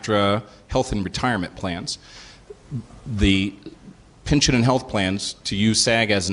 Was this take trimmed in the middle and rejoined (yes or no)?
yes